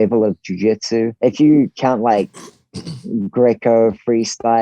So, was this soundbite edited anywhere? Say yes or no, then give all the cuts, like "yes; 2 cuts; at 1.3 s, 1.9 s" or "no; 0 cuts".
yes; 1 cut; at 1.1 s